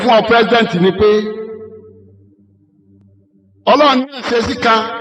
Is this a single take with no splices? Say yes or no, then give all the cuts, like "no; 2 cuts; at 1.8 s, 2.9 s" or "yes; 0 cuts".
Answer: yes; 0 cuts